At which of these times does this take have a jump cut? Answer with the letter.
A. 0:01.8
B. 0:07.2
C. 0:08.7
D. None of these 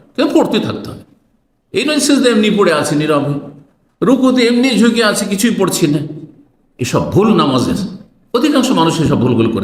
D